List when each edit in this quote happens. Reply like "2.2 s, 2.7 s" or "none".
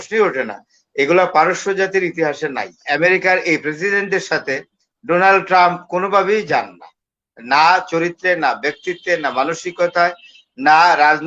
2.8 s